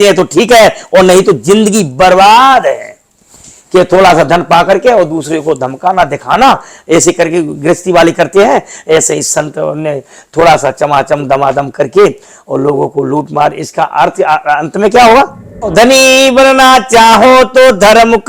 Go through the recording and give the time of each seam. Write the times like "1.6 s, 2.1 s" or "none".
15.7 s